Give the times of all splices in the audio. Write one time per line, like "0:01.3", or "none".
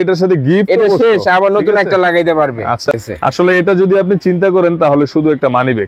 0:02.9